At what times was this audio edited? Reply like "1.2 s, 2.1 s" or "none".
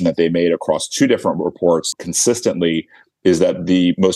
1.9 s

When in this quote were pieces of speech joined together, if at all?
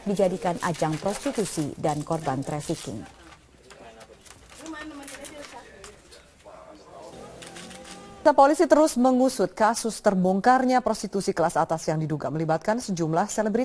2.7 s

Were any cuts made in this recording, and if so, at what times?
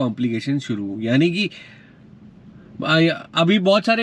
none

